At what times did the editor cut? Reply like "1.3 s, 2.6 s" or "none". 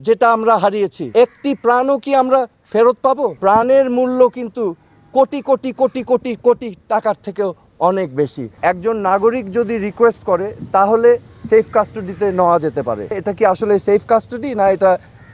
3.3 s, 8.5 s, 13.1 s